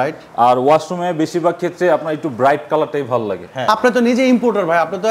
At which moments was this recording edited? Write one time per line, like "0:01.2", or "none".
0:03.6

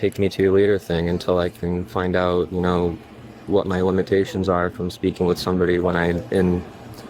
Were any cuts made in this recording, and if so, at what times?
none

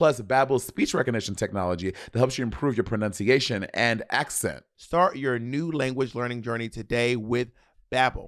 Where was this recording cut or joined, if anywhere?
0:04.7

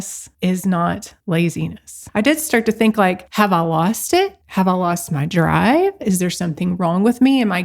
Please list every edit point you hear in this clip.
0:02.1
0:04.4

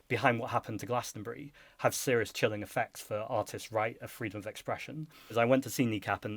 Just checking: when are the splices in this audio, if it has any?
0:05.3

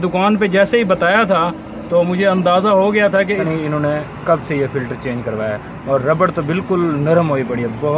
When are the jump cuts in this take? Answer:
0:03.4

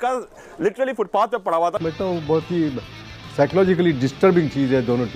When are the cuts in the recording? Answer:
0:01.8

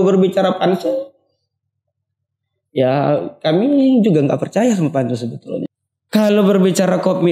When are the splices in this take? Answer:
0:05.7

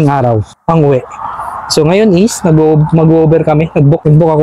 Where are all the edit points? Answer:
none

